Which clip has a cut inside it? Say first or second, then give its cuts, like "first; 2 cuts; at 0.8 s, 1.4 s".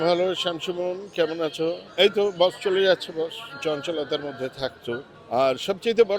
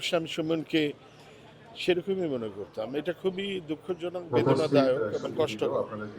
first; 3 cuts; at 1.8 s, 3.5 s, 5.1 s